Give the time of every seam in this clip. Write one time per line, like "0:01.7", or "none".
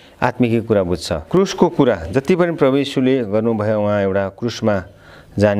0:01.2